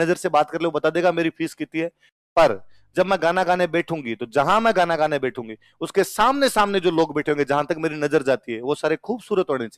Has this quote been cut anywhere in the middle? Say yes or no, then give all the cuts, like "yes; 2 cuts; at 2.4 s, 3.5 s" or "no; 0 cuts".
no; 0 cuts